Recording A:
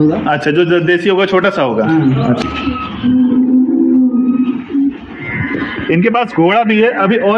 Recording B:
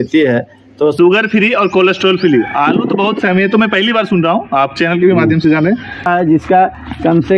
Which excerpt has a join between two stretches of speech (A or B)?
B